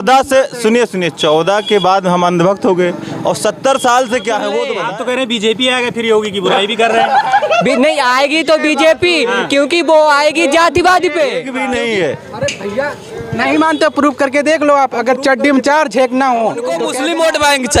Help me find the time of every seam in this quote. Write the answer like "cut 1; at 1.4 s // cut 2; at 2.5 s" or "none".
cut 1; at 4.8 s // cut 2; at 11.5 s // cut 3; at 16.9 s